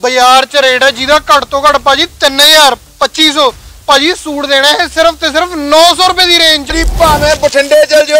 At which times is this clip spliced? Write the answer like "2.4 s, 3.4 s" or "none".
6.7 s

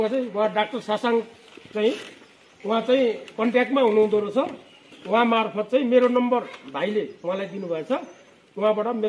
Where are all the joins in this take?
none

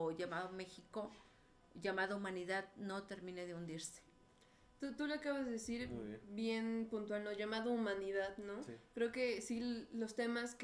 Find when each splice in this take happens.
none

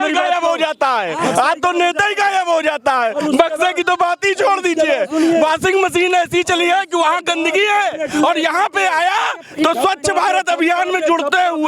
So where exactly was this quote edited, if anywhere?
none

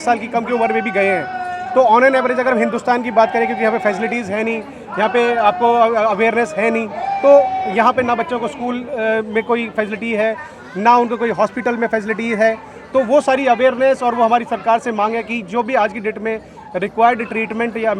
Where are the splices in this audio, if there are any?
none

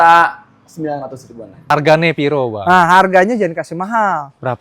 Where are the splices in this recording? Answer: 1.7 s

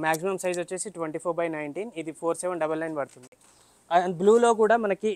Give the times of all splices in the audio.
none

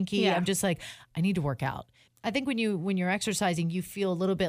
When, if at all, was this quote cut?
2.0 s

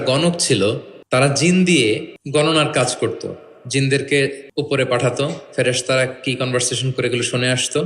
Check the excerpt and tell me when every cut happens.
0.9 s, 2.1 s, 4.4 s

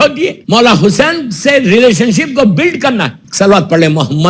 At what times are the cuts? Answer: 3.2 s

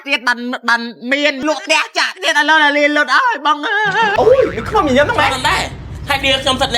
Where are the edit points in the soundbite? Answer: 1.4 s, 4.1 s

